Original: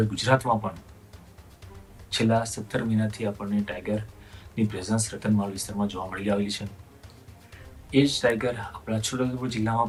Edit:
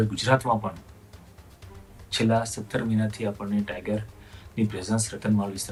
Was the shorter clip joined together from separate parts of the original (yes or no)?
no